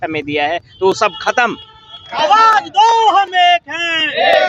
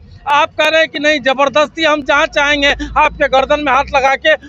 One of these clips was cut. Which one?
first; 1 cut; at 2.1 s

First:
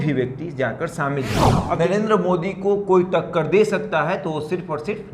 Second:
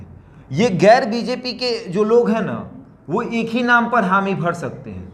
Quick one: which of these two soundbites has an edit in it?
first; 1 cut; at 1.5 s

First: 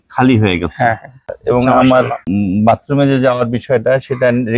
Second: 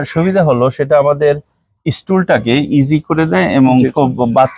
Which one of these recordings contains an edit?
first; 2 cuts; at 1.2 s, 2.2 s

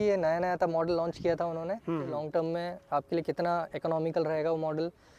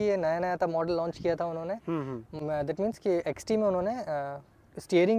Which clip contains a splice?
first; 1 cut; at 2.2 s

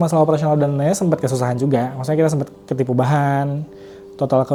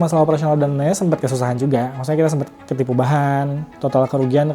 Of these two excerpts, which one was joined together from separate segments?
second; 1 cut; at 3.6 s

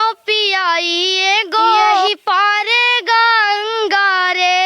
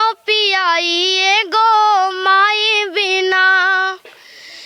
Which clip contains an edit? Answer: first; 1 cut; at 2.1 s

